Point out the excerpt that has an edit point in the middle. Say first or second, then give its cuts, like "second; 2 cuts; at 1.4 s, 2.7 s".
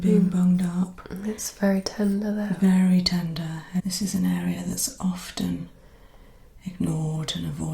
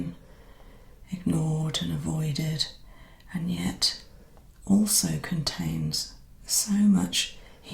first; 1 cut; at 3.9 s